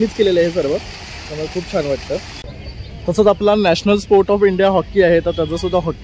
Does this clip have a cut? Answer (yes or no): no